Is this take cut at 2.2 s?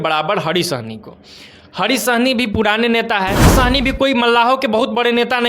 no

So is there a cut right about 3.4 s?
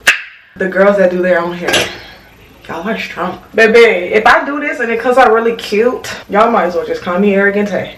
yes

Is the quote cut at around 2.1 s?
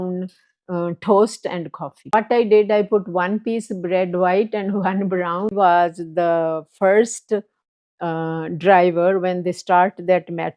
yes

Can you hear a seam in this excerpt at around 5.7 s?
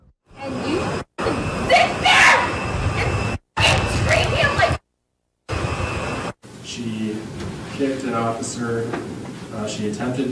yes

